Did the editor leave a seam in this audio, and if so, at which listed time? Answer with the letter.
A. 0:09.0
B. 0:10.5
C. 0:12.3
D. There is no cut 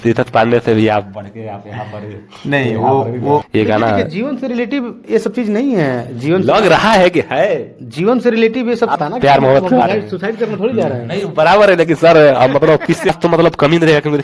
A